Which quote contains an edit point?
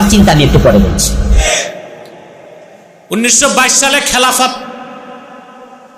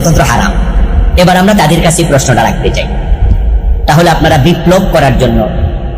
first; 1 cut; at 1.4 s

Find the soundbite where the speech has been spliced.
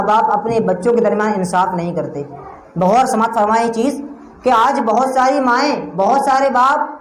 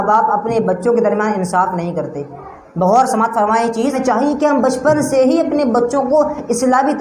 second; 1 cut; at 4.0 s

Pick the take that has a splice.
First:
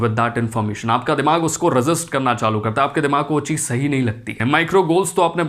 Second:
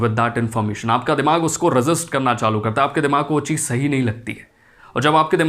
first; 1 cut; at 4.4 s

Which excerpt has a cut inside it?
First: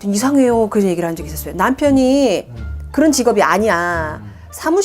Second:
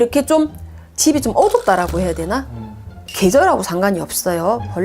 second; 1 cut; at 3.0 s

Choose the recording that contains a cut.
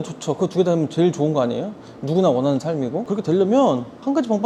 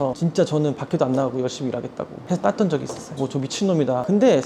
second; 2 cuts; at 2.2 s, 3.2 s

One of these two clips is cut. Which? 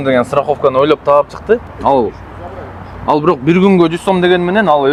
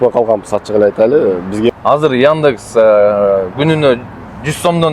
second; 1 cut; at 1.7 s

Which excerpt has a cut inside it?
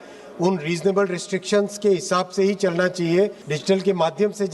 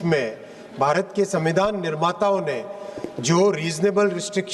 first; 1 cut; at 3.5 s

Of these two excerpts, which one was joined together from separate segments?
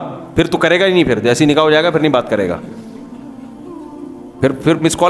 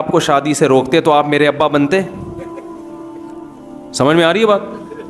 first; 2 cuts; at 2.7 s, 4.2 s

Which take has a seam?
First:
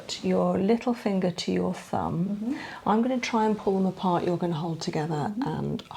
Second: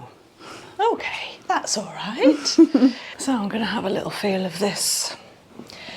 second; 1 cut; at 3.1 s

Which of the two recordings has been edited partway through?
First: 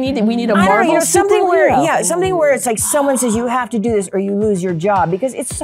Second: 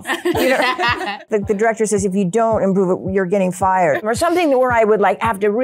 second; 2 cuts; at 1.2 s, 4.0 s

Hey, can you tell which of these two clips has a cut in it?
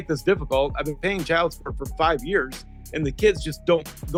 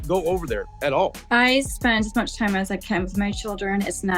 second; 1 cut; at 1.2 s

